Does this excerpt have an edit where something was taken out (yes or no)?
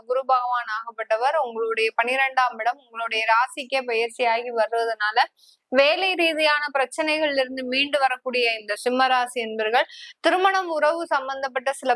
no